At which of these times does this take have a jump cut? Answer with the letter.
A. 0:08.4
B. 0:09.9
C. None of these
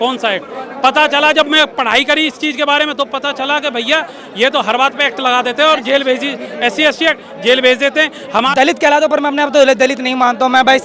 A